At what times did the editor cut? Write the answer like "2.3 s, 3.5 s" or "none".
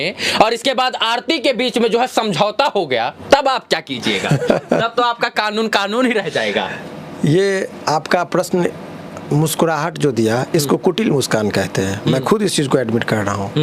none

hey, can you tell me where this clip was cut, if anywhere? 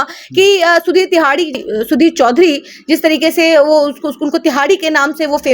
1.6 s

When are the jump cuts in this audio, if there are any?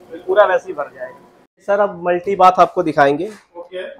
1.6 s

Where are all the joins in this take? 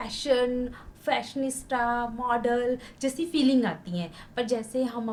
none

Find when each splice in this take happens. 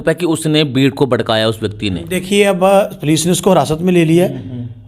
none

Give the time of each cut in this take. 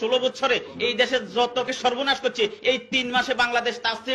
1.7 s

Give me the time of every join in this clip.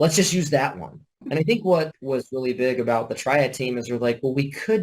1.1 s, 2.0 s

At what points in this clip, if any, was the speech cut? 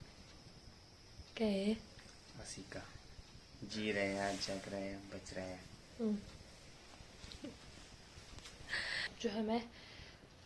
9.1 s

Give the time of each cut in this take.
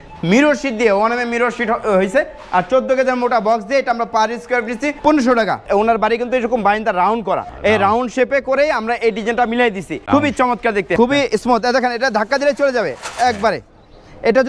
5.0 s, 5.6 s, 7.5 s, 9.9 s, 11.0 s

